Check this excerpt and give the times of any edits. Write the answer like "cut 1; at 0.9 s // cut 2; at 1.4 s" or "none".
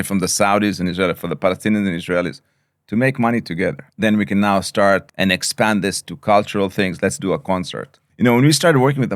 cut 1; at 3.9 s // cut 2; at 5.1 s // cut 3; at 8.0 s